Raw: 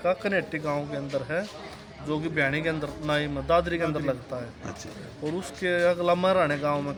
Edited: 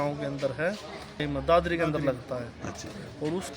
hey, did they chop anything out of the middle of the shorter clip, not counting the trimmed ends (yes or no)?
yes